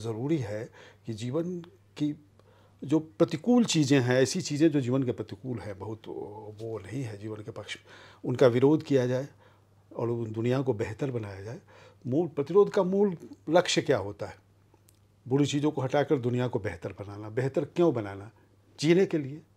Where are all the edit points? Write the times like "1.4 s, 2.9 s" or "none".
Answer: none

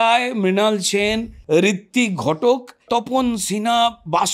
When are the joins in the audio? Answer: 1.3 s, 2.9 s

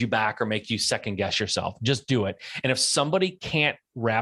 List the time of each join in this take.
none

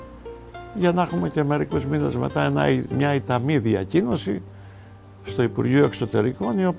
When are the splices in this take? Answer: none

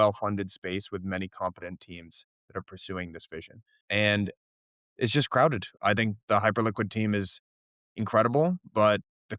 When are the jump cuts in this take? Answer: 3.8 s, 5.7 s

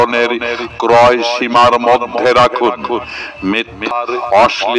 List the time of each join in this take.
3.9 s

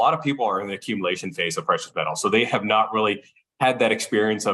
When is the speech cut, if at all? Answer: none

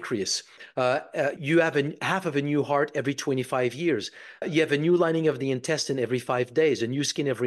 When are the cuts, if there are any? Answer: 1.4 s, 4.4 s

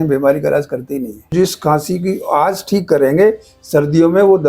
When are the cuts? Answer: 1.3 s

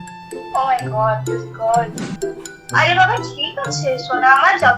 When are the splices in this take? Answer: 2.0 s

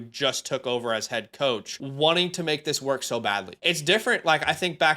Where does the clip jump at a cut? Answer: 1.8 s, 3.5 s

